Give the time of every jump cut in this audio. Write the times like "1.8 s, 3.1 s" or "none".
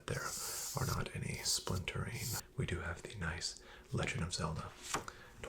2.4 s

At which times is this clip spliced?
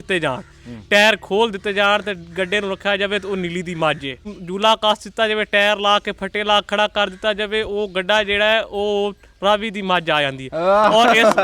4.4 s

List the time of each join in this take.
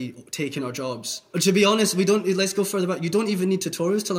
1.0 s

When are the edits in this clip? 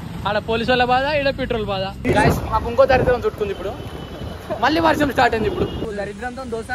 2.0 s, 5.8 s

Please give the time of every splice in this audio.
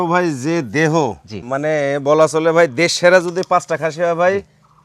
1.3 s

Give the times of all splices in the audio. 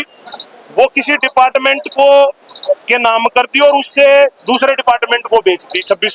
none

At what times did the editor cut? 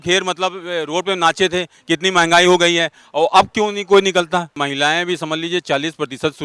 4.5 s

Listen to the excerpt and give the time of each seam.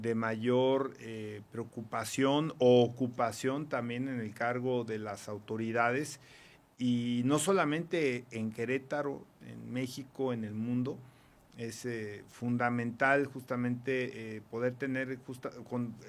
none

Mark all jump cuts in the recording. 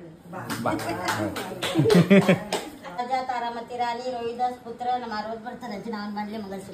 3.0 s

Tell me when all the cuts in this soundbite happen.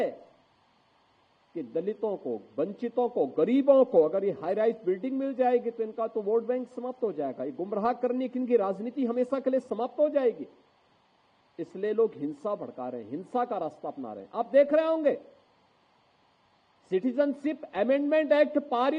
none

